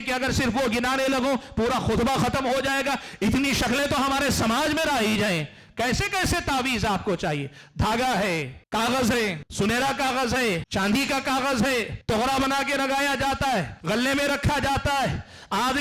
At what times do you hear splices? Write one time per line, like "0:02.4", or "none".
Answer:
0:08.6
0:09.4
0:10.7
0:11.9
0:13.7